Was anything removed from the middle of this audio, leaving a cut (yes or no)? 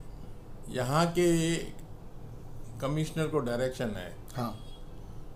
no